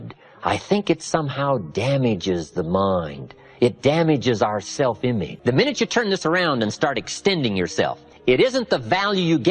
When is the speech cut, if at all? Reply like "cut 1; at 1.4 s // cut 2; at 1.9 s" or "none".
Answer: cut 1; at 5.3 s // cut 2; at 8.1 s